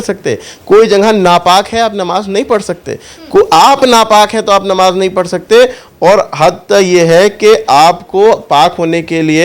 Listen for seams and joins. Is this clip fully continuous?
yes; 0 cuts

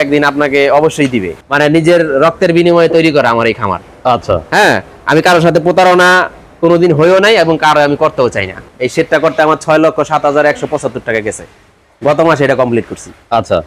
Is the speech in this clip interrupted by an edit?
yes; 2 cuts; at 1.3 s, 8.7 s

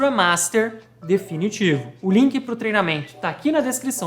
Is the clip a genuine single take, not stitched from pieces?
no; 1 cut; at 1.9 s

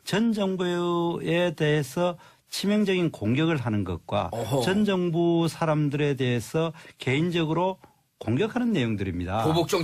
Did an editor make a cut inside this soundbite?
yes; 1 cut; at 1.2 s

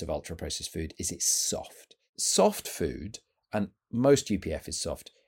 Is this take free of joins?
no; 1 cut; at 2.1 s

